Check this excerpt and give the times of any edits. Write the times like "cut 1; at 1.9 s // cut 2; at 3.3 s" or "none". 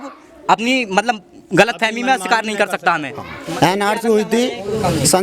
cut 1; at 3.4 s